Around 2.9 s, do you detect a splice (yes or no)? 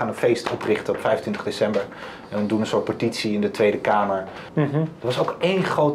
no